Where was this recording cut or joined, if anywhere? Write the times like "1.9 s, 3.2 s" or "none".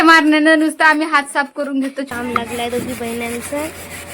2.1 s